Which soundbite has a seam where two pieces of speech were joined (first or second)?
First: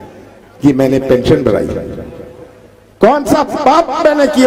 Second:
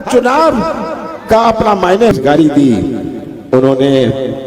second